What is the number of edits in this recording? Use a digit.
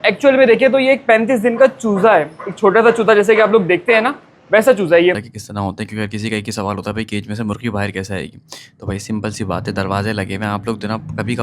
1